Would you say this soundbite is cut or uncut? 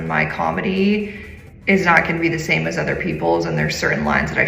uncut